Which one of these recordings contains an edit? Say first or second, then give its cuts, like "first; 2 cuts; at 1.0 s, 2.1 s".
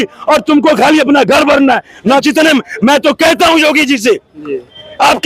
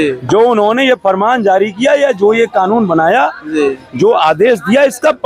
first; 1 cut; at 2.2 s